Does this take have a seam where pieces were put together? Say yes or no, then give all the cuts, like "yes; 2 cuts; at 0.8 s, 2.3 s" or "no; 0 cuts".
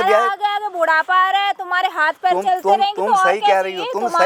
no; 0 cuts